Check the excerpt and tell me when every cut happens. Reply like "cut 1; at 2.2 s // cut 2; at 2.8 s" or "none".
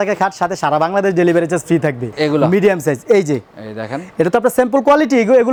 none

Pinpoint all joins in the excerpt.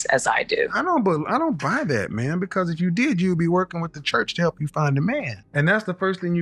cut 1; at 5.4 s

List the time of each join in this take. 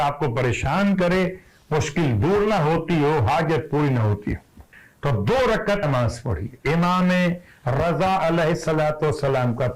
cut 1; at 5.9 s

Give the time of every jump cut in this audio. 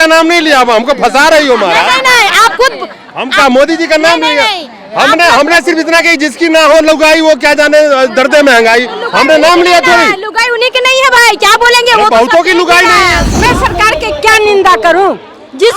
cut 1; at 13.3 s

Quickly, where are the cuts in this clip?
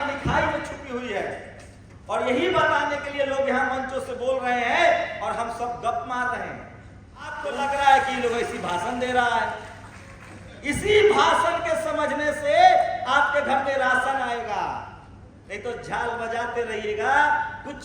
cut 1; at 7.5 s

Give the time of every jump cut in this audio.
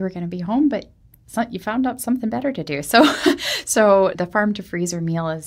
cut 1; at 4.2 s

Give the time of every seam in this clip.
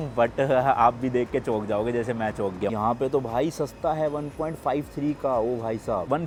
none

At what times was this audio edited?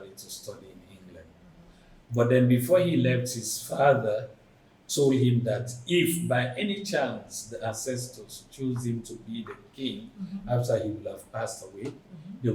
none

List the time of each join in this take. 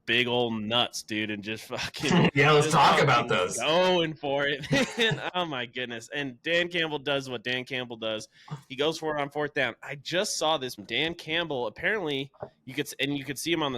cut 1; at 10.8 s

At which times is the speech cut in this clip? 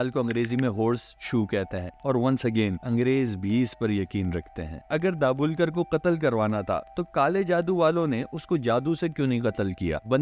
cut 1; at 4.8 s

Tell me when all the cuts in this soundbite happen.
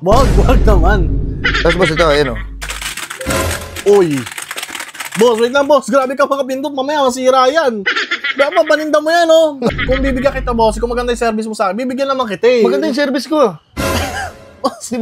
cut 1; at 9.8 s

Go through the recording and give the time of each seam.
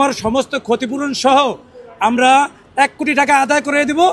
none

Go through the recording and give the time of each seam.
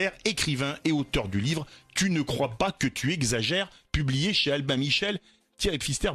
cut 1; at 2.6 s

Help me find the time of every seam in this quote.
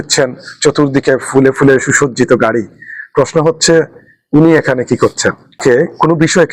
cut 1; at 5.6 s

